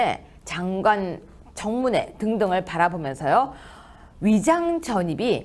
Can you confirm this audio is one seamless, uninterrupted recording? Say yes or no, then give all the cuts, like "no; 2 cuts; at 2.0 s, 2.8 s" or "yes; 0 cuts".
no; 1 cut; at 3.5 s